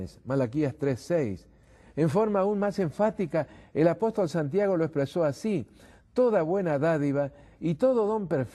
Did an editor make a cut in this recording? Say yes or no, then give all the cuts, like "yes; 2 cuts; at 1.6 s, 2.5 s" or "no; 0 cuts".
no; 0 cuts